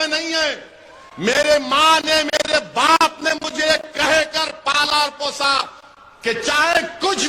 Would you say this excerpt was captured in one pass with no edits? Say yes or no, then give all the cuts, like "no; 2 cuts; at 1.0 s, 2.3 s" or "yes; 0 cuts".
yes; 0 cuts